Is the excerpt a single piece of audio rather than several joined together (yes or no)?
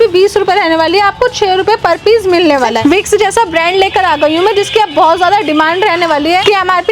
yes